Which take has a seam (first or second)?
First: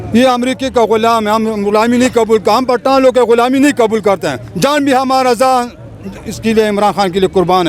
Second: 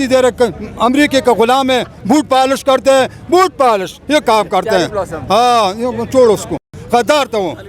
second